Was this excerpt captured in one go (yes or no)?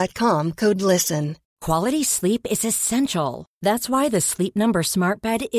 no